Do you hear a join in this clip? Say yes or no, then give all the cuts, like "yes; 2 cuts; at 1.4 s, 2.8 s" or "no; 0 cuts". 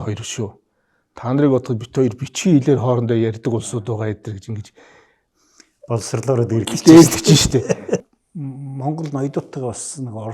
yes; 1 cut; at 8.1 s